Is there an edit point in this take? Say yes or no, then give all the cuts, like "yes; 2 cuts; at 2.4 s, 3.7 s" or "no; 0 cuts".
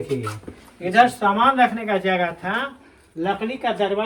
no; 0 cuts